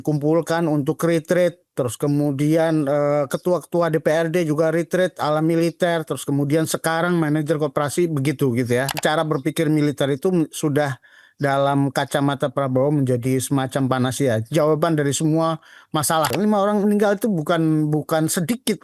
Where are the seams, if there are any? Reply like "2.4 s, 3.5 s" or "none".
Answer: 8.9 s, 16.3 s